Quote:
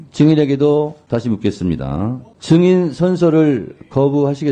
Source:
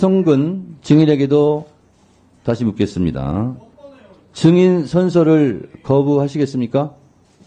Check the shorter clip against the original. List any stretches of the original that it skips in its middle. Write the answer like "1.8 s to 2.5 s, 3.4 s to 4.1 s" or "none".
1.7 s to 2.3 s, 3.6 s to 4.2 s